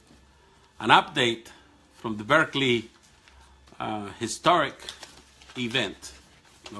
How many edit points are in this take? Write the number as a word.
one